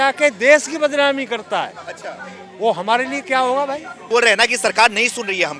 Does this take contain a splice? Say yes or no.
yes